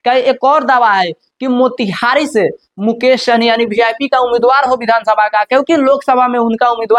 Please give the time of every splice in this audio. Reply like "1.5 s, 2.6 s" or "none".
none